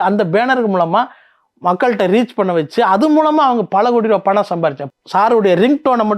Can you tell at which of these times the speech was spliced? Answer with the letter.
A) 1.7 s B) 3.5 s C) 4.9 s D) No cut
C